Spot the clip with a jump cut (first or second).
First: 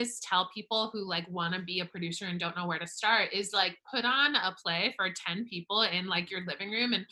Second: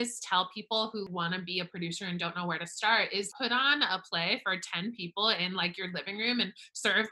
second